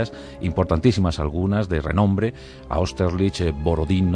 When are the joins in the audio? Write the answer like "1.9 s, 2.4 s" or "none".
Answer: 2.6 s

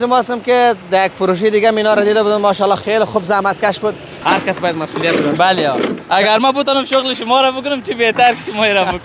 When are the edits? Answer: 4.1 s

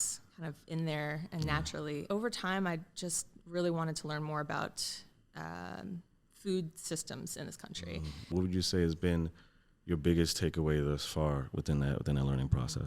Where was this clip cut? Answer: 2.1 s, 8.3 s

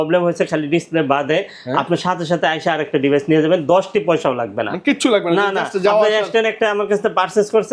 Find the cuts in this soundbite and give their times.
none

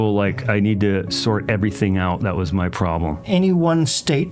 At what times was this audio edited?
3.2 s

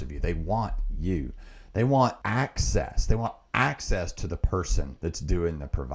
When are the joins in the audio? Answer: 2.2 s, 4.9 s

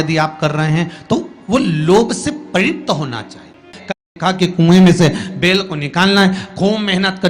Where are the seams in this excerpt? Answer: 4.1 s

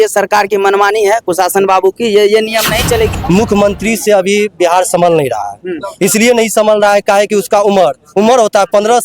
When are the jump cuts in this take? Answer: 3.2 s

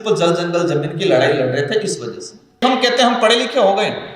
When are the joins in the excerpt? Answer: 2.6 s

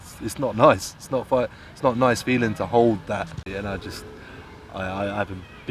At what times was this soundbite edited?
3.4 s

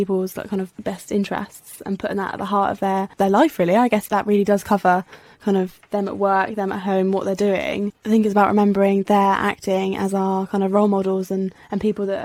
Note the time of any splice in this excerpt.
none

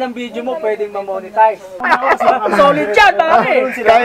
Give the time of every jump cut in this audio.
1.8 s

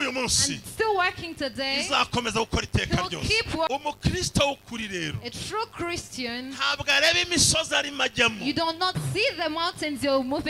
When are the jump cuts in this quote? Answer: 3.7 s

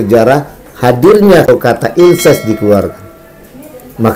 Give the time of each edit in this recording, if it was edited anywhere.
1.3 s

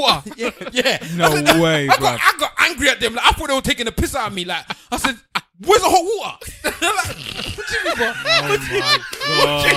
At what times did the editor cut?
none

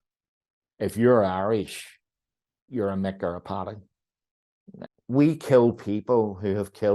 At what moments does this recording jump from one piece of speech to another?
4.9 s

